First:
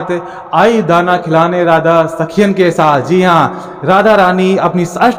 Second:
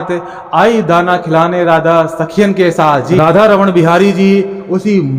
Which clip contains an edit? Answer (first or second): second